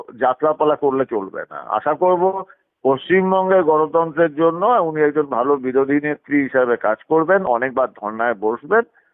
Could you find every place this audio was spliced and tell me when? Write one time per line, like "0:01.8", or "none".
none